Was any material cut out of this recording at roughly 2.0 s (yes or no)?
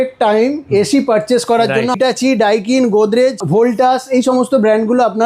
yes